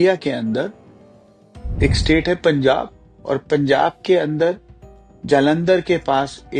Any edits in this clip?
no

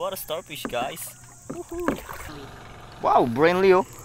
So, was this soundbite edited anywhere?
yes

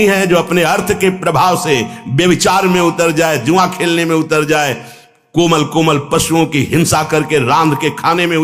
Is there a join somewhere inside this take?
no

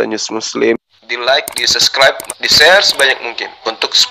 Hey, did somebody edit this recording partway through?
no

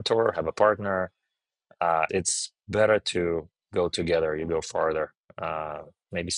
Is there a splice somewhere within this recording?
yes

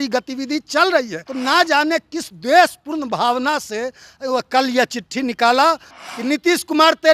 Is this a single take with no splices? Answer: no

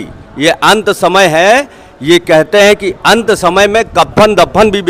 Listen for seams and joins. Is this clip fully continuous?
yes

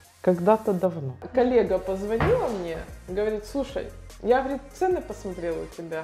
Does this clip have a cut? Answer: yes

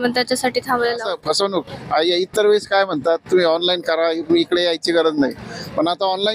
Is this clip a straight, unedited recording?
no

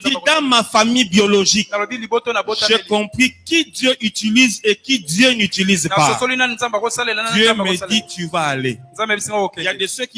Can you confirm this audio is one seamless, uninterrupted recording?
yes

